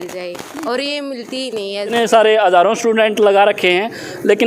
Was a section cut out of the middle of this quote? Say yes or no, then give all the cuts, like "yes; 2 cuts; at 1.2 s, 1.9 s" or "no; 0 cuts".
yes; 1 cut; at 1.9 s